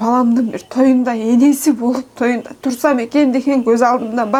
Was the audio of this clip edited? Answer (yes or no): no